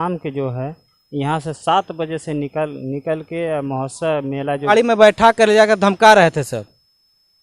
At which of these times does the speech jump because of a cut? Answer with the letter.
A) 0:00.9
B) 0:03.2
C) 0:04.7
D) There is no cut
C